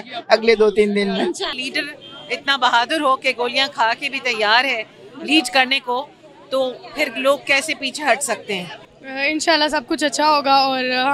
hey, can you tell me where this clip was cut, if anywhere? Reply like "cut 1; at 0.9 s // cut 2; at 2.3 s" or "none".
cut 1; at 1.5 s // cut 2; at 8.8 s